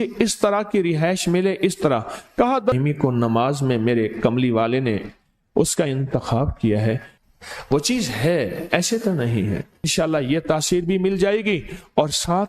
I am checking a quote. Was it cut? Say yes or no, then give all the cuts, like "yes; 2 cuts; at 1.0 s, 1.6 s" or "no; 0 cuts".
yes; 3 cuts; at 2.7 s, 7.1 s, 9.9 s